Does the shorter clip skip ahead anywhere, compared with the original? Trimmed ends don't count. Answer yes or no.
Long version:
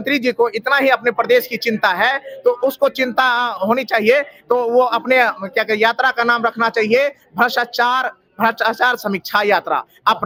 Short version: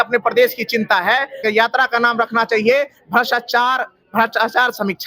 yes